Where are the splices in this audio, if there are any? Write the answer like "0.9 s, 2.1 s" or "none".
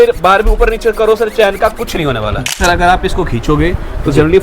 2.5 s